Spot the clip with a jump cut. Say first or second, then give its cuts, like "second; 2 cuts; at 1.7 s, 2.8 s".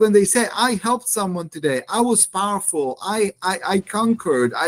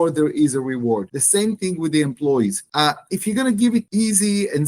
second; 3 cuts; at 1.2 s, 2.6 s, 3.9 s